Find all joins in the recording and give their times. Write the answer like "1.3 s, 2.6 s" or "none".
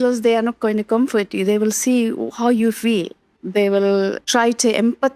3.3 s, 4.2 s

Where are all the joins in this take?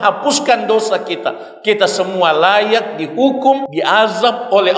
3.7 s

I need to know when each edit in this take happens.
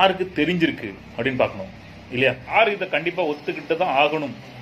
2.5 s

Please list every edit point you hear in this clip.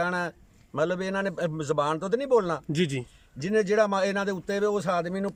none

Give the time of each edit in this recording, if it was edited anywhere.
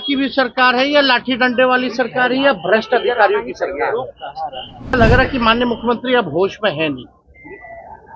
5.0 s

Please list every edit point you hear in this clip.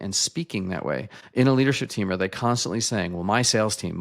1.2 s

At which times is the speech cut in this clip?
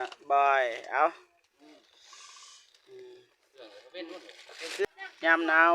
4.9 s

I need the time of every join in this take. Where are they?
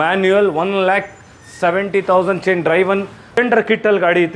3.4 s

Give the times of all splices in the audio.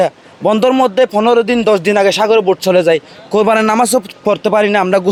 none

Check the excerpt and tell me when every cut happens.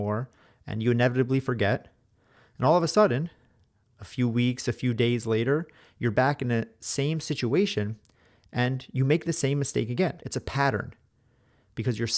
10.2 s

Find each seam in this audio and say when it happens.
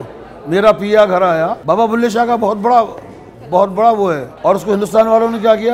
1.6 s, 4.3 s

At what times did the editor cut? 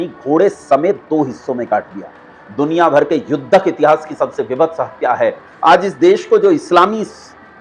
5.5 s

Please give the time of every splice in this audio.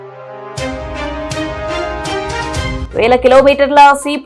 2.8 s

